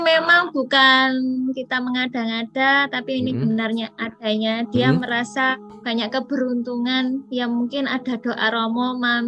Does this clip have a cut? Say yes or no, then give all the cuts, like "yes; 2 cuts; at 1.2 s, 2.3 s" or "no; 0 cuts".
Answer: no; 0 cuts